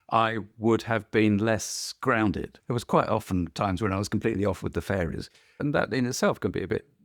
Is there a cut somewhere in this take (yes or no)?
yes